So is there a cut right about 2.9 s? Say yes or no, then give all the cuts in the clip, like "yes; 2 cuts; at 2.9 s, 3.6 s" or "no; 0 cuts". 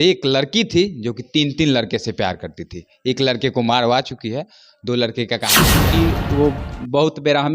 no; 1 cut; at 5.8 s